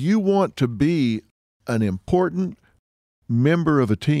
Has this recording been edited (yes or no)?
no